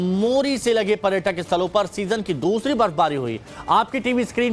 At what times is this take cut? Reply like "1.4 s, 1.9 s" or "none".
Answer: none